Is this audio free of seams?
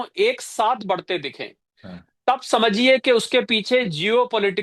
yes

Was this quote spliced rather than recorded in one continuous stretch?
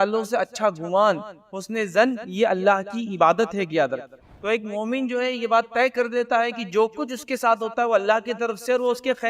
yes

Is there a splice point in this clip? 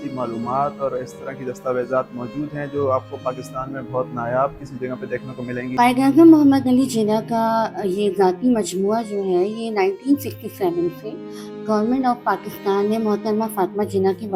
yes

